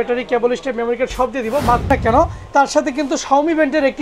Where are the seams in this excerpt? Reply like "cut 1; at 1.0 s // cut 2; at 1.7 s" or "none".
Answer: cut 1; at 1.9 s